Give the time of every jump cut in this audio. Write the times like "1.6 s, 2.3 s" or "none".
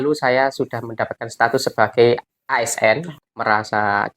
3.1 s